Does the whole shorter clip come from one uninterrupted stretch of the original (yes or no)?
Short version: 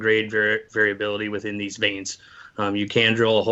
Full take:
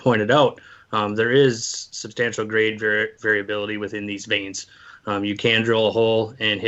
yes